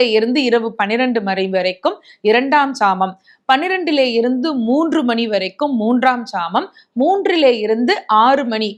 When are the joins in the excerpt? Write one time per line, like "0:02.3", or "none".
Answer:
none